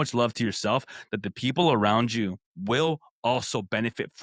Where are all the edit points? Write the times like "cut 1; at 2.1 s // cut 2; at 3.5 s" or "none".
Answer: cut 1; at 2.5 s